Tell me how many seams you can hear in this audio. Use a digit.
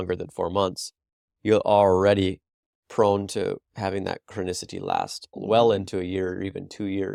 0